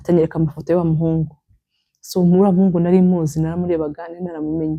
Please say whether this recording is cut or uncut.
uncut